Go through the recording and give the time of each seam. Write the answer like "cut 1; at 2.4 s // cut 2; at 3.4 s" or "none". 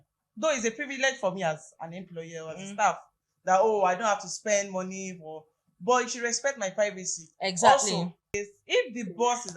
cut 1; at 8.4 s